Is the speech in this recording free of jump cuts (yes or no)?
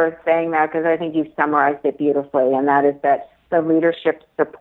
yes